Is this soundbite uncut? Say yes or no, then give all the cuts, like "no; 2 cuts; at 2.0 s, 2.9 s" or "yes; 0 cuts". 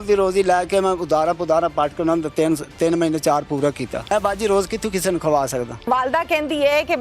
no; 2 cuts; at 4.1 s, 5.8 s